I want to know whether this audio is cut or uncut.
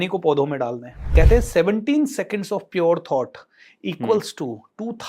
cut